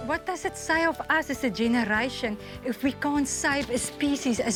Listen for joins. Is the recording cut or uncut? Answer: uncut